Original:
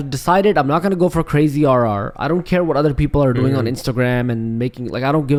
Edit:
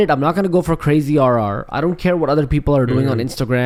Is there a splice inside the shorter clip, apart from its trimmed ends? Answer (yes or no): no